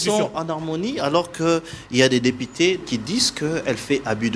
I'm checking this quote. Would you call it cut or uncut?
cut